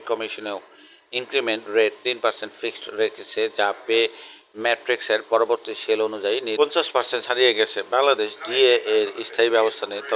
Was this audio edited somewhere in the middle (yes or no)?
yes